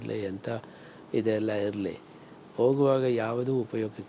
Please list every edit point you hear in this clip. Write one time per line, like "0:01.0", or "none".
none